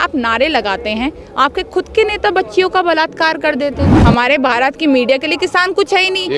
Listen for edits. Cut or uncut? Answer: cut